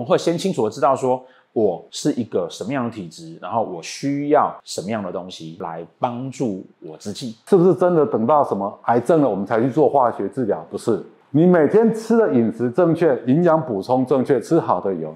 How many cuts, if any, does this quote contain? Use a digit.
1